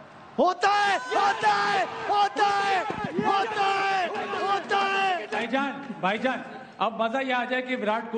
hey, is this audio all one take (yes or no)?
no